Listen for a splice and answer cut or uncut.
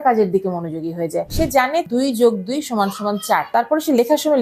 cut